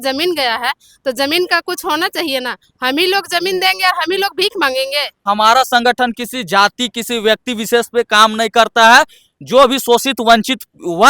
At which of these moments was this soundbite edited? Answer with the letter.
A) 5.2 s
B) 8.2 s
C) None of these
A